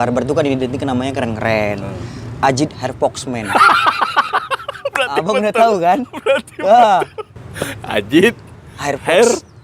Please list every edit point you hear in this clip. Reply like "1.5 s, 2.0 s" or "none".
7.3 s